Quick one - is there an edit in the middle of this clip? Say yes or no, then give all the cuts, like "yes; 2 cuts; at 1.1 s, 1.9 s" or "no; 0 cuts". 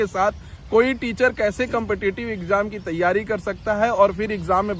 no; 0 cuts